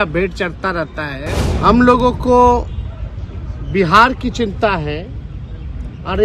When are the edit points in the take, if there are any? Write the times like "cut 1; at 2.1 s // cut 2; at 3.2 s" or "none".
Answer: cut 1; at 1.4 s